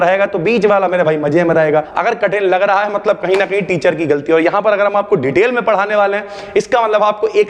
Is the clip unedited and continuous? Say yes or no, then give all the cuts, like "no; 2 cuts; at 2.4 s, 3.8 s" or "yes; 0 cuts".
no; 1 cut; at 1.9 s